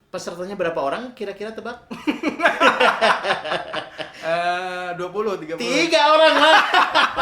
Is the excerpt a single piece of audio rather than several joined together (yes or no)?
yes